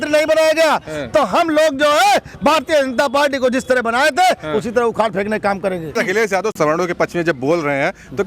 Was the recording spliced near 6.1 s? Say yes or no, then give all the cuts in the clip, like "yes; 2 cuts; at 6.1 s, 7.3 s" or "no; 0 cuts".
yes; 1 cut; at 6.1 s